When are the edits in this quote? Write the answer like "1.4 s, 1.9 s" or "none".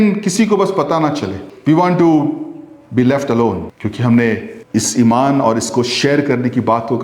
1.4 s, 3.7 s, 4.6 s